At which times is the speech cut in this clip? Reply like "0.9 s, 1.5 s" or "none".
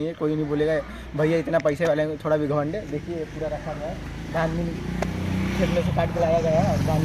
none